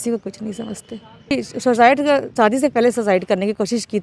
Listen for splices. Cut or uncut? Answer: cut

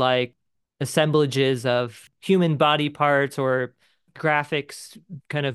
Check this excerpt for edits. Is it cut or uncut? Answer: cut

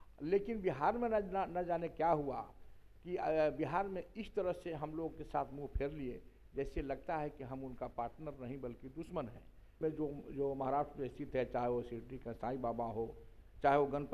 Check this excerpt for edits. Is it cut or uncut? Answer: cut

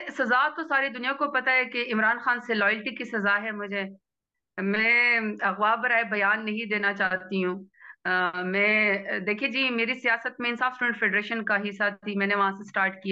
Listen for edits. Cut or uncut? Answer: uncut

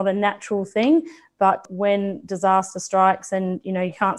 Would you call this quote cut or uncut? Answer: uncut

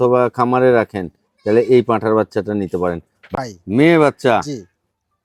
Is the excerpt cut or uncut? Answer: cut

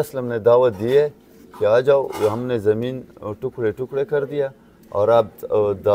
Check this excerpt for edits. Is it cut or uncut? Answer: uncut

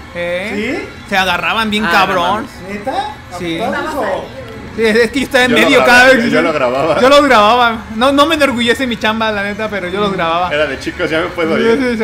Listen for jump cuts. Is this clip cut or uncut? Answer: uncut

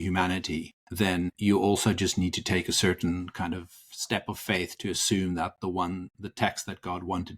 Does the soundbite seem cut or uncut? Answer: cut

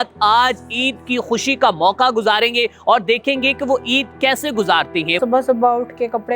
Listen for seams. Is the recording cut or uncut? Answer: cut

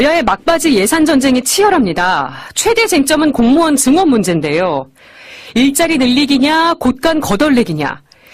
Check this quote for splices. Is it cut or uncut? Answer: uncut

